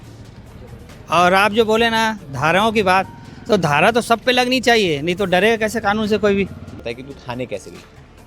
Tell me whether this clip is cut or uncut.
cut